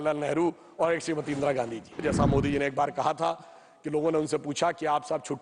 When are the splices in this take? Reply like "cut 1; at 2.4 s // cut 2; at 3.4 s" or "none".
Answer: cut 1; at 2.0 s